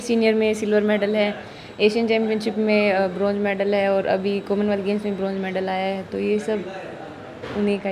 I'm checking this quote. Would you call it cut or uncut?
uncut